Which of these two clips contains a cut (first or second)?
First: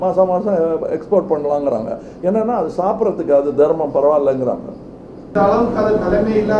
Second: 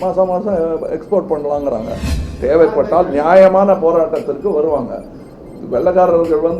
second